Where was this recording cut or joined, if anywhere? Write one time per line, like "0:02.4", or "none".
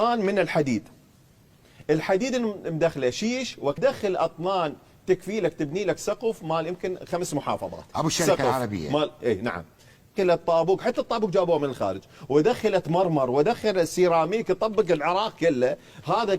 0:03.8
0:10.1